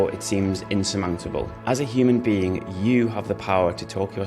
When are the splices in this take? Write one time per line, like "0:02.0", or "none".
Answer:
0:01.5